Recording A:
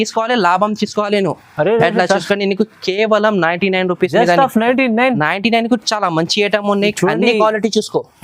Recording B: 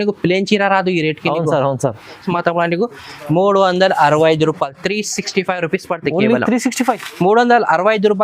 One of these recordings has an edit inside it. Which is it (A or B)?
B